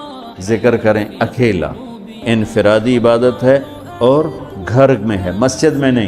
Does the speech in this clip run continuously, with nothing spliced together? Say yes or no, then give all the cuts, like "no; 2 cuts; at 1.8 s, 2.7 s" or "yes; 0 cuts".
no; 1 cut; at 2.2 s